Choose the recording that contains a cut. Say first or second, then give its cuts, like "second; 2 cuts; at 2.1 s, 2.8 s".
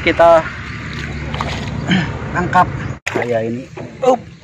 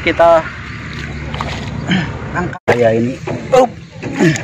second; 1 cut; at 2.5 s